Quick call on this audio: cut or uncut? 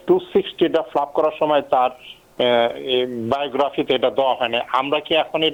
uncut